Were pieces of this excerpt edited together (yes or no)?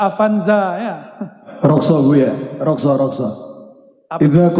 yes